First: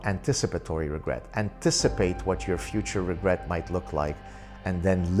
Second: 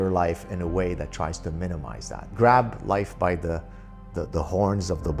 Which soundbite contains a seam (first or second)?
second